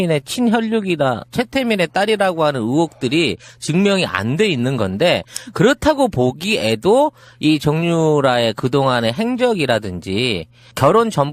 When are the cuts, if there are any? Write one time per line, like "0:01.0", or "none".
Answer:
none